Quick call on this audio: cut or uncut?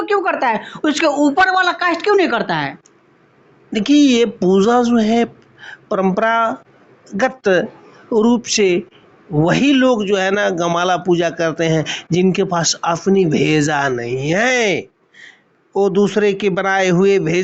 uncut